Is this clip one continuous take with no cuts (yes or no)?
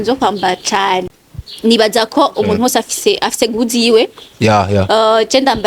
no